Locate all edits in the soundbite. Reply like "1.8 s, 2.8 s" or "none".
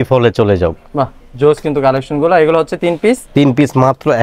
none